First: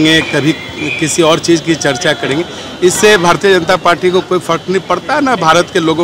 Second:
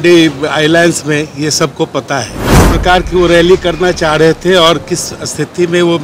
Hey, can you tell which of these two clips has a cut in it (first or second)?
second